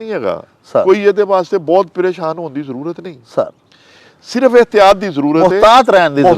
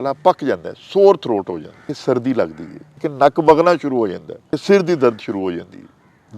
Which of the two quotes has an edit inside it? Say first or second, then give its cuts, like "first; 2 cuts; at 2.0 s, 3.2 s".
second; 3 cuts; at 1.9 s, 3.1 s, 4.6 s